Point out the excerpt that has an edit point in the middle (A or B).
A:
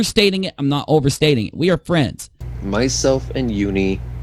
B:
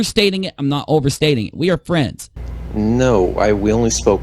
B